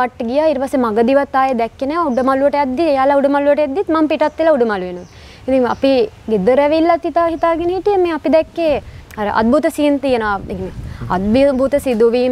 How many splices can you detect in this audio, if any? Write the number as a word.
zero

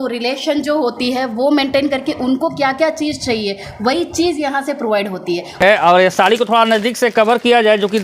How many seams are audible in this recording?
one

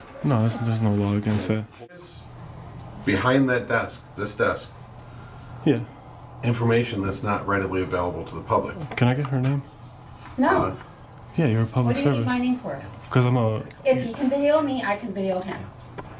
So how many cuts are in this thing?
one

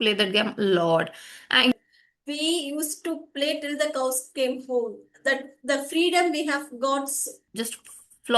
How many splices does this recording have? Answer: two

